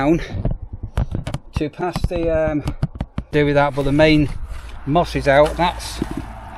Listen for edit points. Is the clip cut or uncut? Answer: cut